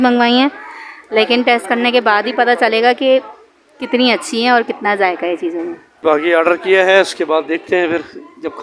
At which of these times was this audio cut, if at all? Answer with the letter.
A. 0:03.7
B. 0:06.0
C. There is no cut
C